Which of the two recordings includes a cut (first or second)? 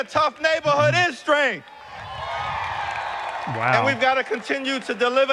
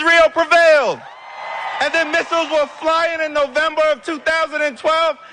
second